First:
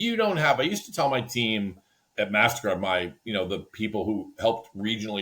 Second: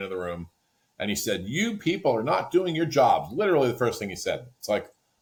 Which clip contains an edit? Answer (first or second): first